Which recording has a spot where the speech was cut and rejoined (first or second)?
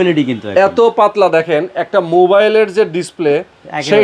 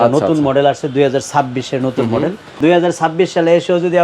second